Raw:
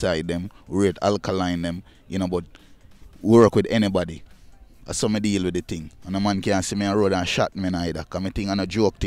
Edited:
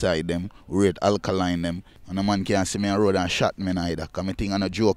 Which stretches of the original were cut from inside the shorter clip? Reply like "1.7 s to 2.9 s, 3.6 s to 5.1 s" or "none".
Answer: 1.9 s to 5.9 s